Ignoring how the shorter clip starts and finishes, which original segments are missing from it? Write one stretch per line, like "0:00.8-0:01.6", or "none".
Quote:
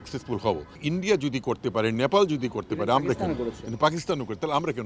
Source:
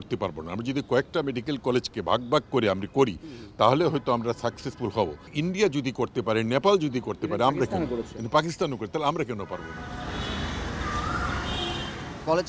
none